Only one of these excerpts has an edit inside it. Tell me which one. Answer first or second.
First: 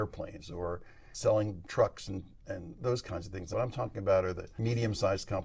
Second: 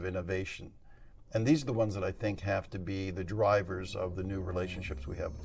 first